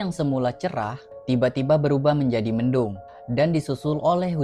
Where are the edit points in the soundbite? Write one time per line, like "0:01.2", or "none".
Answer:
none